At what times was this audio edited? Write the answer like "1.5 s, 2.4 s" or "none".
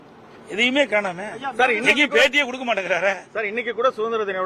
none